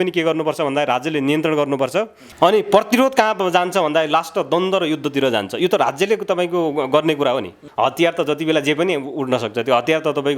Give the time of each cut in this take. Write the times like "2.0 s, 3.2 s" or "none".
2.2 s, 7.6 s